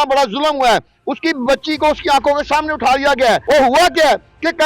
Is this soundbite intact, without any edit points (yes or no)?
no